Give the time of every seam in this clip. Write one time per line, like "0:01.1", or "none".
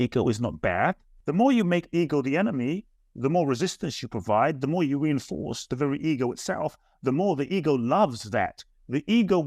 0:01.1

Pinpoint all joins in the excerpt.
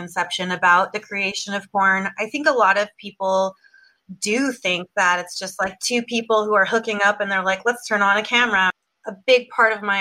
0:08.7

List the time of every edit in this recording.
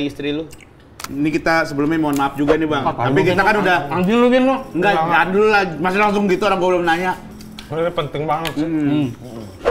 0:01.1

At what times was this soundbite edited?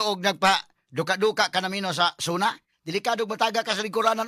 none

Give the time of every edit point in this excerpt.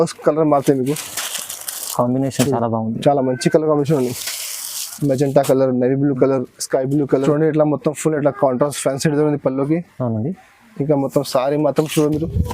0:07.2

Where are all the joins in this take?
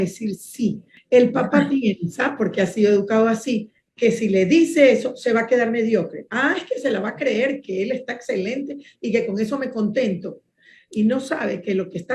0:00.9

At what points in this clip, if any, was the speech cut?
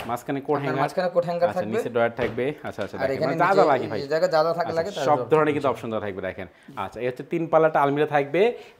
none

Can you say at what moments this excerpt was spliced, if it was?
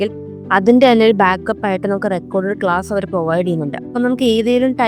none

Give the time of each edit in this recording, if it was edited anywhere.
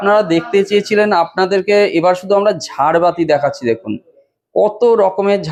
none

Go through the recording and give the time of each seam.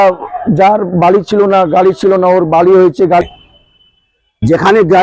0:03.2

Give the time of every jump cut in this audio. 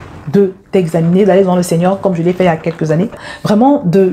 0:03.2

